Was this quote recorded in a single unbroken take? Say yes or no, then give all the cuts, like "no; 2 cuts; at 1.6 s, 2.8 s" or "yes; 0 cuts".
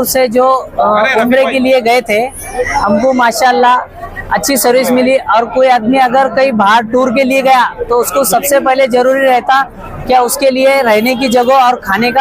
yes; 0 cuts